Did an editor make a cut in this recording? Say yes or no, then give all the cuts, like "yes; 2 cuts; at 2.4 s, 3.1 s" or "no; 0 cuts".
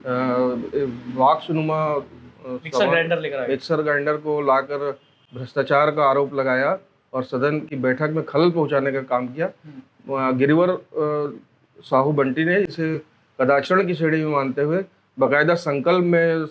no; 0 cuts